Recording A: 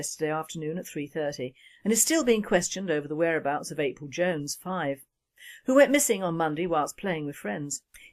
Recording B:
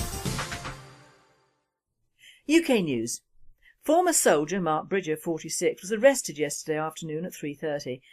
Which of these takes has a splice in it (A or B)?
B